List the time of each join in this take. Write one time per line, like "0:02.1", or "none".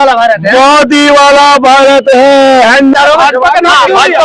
0:02.9